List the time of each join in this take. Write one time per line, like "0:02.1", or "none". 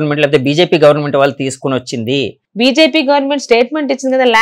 0:02.4